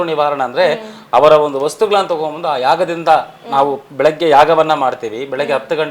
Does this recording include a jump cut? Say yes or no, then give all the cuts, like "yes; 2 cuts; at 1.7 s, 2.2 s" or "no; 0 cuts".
no; 0 cuts